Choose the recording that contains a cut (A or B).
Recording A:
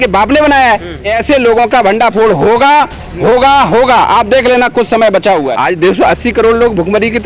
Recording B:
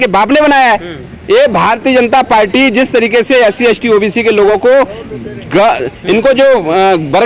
A